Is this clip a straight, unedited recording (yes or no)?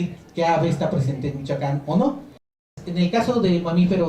no